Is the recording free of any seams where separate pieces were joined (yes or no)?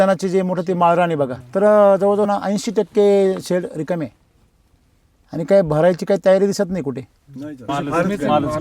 no